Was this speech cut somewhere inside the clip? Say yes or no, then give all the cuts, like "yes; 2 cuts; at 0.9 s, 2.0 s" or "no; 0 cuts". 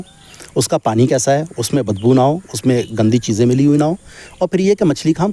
no; 0 cuts